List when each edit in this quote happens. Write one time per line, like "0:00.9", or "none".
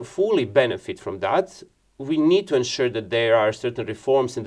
none

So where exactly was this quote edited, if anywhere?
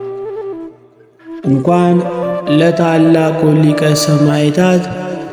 0:01.4

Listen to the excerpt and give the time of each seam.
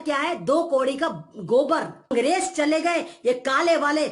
0:02.1

